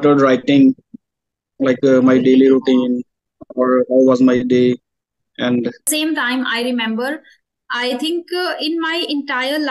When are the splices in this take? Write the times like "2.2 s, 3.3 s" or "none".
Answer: 5.9 s